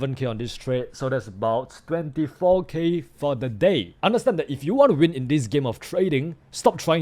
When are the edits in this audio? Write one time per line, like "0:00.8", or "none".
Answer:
0:03.9

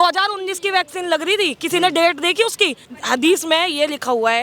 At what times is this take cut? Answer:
0:02.9

